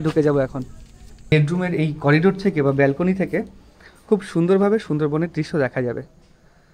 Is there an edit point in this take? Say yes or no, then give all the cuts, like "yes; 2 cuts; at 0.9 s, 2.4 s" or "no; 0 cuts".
yes; 1 cut; at 1.3 s